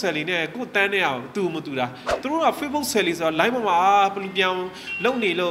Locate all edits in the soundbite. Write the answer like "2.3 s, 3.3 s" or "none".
2.1 s

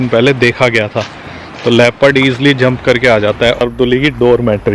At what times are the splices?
3.6 s

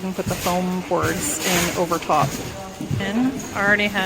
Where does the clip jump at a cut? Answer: 3.0 s

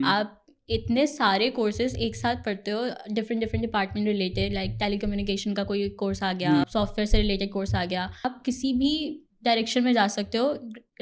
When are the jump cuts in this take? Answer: 6.6 s, 8.3 s

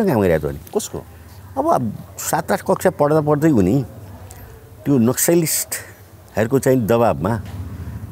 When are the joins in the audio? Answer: none

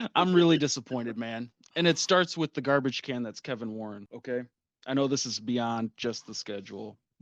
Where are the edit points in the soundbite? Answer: 4.1 s

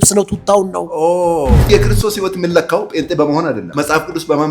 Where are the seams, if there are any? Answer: 1.7 s, 3.7 s

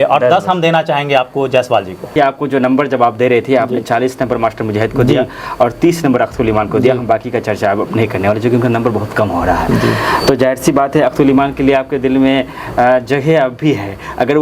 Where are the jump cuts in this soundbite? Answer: 2.1 s

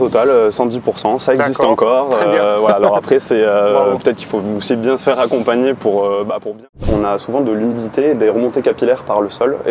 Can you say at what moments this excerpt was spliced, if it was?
6.8 s

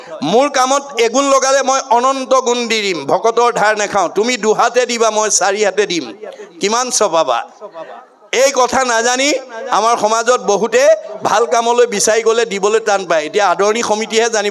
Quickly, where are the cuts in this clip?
none

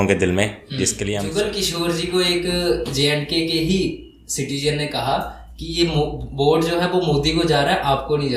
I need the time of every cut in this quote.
1.1 s

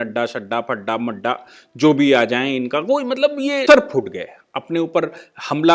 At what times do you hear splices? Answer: 3.6 s

